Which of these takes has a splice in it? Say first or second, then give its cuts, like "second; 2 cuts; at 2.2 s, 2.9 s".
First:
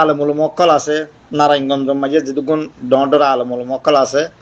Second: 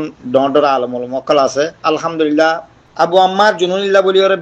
second; 1 cut; at 2.8 s